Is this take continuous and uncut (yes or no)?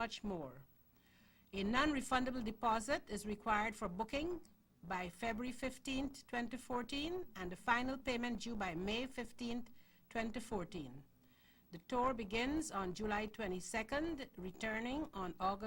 yes